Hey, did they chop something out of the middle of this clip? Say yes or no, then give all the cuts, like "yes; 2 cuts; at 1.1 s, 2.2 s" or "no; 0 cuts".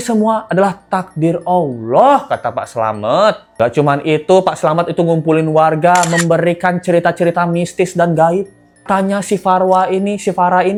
no; 0 cuts